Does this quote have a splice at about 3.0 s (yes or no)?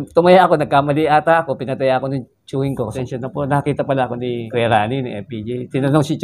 yes